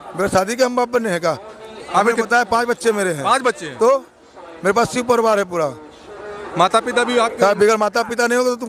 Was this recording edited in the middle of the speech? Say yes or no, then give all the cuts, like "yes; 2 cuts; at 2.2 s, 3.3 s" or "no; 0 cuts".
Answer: no; 0 cuts